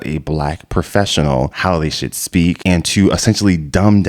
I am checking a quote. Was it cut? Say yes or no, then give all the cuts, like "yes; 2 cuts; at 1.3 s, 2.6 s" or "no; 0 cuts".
yes; 2 cuts; at 1.5 s, 2.6 s